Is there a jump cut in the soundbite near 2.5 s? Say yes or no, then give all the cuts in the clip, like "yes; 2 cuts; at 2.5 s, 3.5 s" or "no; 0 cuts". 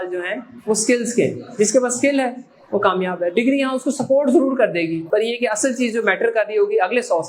no; 1 cut; at 5.0 s